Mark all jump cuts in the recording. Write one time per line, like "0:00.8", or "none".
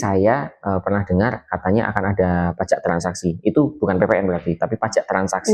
none